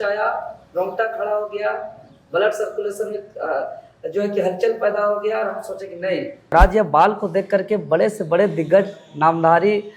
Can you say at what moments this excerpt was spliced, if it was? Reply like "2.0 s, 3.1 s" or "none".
6.5 s